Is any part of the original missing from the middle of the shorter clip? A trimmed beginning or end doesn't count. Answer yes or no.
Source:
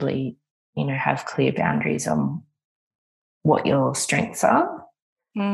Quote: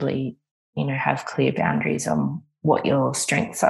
yes